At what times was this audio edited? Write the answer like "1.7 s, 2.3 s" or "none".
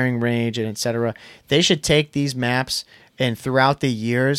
none